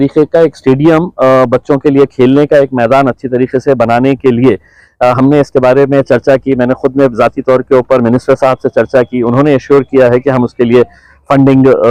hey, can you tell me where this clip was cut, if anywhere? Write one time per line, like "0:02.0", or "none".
none